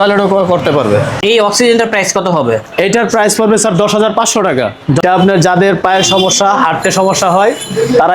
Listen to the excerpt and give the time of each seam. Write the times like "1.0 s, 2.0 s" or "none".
1.1 s, 5.0 s